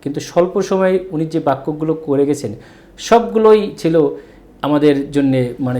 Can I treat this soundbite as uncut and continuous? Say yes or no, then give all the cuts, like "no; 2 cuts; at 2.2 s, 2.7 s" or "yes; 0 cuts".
yes; 0 cuts